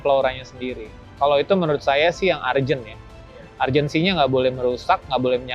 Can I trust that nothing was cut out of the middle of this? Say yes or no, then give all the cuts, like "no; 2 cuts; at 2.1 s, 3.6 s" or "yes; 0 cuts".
yes; 0 cuts